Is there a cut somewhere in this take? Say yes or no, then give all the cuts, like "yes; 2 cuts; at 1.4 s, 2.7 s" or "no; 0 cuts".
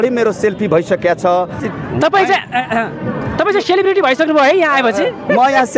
yes; 1 cut; at 1.6 s